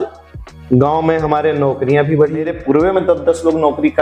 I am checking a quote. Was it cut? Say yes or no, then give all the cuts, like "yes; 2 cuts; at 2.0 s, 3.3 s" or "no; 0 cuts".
yes; 1 cut; at 2.5 s